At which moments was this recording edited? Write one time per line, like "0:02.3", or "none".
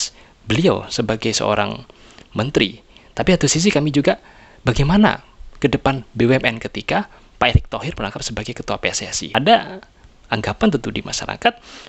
0:09.2